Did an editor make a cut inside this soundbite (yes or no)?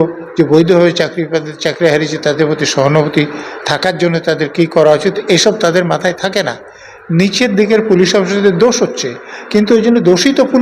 no